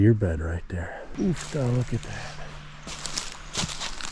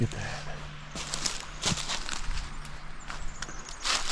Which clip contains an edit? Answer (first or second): first